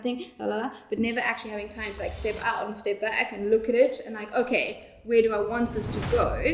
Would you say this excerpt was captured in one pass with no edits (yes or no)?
yes